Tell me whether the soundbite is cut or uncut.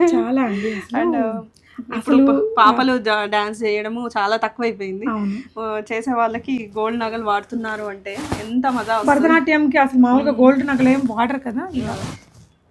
uncut